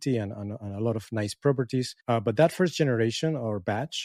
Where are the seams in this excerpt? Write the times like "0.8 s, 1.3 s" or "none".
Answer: 2.0 s